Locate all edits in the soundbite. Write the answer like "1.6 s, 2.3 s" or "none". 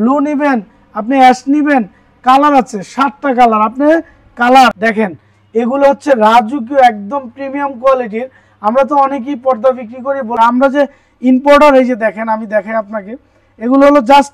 4.7 s, 10.3 s